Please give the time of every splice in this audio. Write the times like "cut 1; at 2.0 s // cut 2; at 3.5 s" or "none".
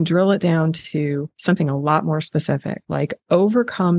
cut 1; at 1.3 s // cut 2; at 2.8 s